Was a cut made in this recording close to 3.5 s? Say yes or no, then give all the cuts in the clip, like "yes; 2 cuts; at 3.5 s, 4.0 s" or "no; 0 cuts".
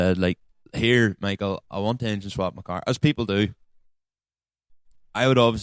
no; 0 cuts